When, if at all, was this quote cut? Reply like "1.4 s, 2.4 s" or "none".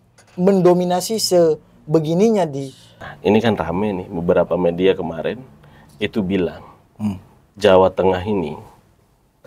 3.1 s